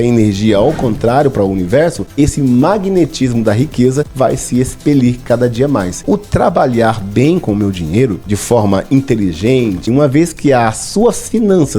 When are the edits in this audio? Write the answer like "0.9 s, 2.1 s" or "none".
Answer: 2.0 s, 4.1 s, 6.0 s, 8.3 s, 9.9 s